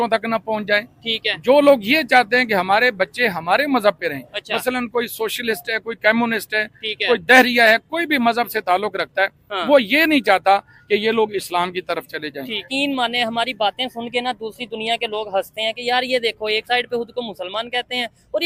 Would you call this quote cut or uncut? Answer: cut